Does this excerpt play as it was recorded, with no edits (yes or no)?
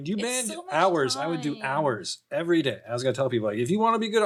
yes